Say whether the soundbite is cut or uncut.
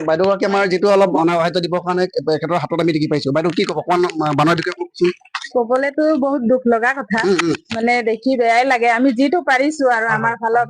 cut